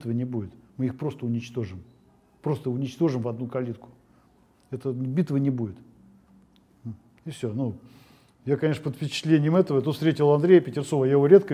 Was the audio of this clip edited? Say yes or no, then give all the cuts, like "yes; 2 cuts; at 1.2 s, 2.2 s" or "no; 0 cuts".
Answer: no; 0 cuts